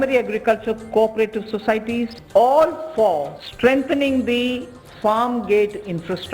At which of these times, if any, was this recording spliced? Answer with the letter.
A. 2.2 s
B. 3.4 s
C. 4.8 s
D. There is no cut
A